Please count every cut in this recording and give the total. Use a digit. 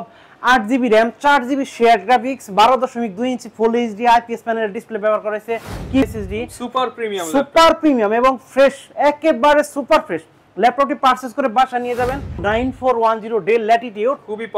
2